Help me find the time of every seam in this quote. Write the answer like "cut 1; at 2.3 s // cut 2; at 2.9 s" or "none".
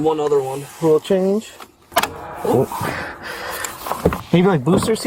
cut 1; at 1.8 s